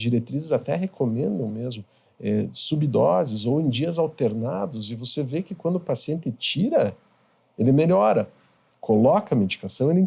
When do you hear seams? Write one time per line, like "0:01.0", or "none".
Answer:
none